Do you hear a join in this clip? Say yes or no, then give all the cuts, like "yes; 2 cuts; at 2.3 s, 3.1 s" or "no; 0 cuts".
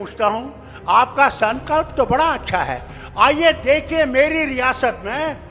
no; 0 cuts